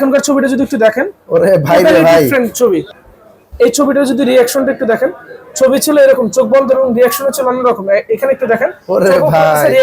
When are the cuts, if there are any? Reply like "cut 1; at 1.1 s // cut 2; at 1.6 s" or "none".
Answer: cut 1; at 3.0 s